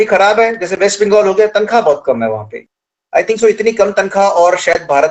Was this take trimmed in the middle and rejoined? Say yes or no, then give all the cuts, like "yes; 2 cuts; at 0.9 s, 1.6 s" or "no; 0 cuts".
no; 0 cuts